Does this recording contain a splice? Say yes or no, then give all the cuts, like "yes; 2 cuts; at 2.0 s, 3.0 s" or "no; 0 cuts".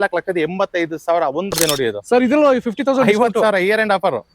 yes; 1 cut; at 1.5 s